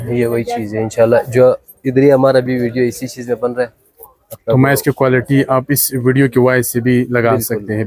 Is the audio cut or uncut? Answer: uncut